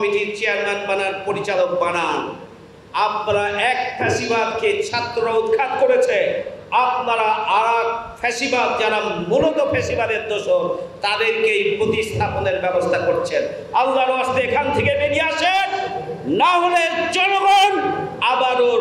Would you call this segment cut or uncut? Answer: uncut